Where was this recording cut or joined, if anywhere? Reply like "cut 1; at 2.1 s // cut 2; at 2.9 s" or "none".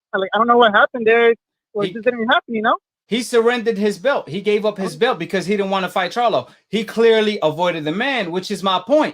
cut 1; at 3.0 s